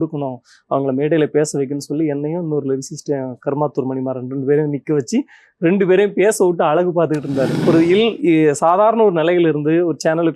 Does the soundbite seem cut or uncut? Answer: cut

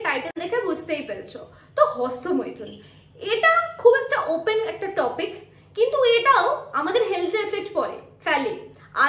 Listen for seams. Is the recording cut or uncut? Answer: uncut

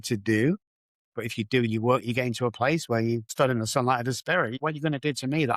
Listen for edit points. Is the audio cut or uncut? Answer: cut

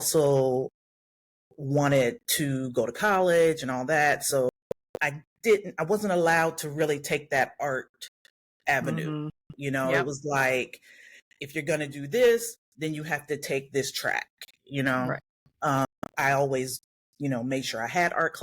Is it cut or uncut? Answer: cut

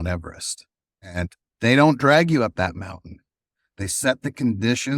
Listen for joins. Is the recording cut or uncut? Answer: cut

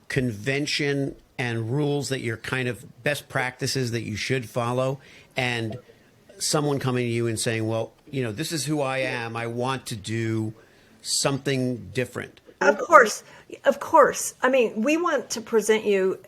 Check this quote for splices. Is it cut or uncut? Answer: cut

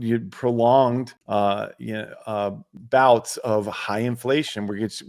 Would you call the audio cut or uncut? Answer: cut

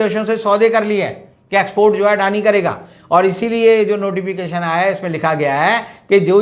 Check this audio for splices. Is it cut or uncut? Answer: uncut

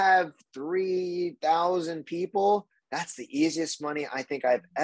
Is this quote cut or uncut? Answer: uncut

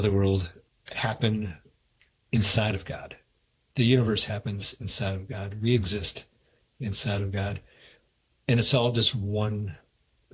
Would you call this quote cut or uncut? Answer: uncut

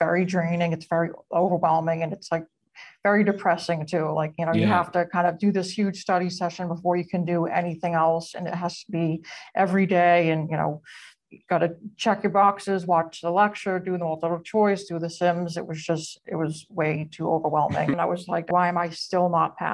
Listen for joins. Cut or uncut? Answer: cut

